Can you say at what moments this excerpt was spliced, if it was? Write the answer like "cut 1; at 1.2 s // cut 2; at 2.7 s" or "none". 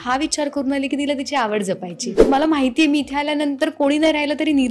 cut 1; at 2.1 s